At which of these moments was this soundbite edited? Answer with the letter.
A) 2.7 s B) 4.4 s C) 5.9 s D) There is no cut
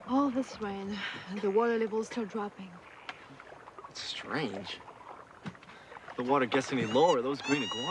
C